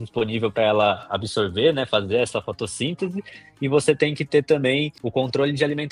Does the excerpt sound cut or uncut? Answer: cut